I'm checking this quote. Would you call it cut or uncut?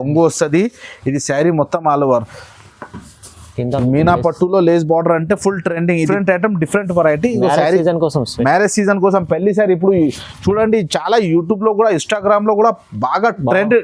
cut